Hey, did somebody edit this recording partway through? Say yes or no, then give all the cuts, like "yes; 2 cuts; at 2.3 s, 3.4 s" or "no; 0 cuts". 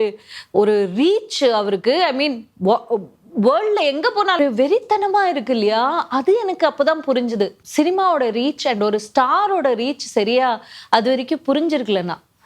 yes; 2 cuts; at 4.4 s, 7.6 s